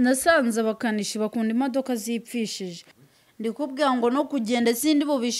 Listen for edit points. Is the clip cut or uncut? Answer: cut